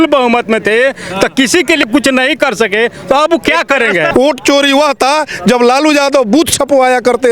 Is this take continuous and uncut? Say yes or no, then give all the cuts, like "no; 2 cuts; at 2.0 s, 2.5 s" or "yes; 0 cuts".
no; 2 cuts; at 1.9 s, 4.1 s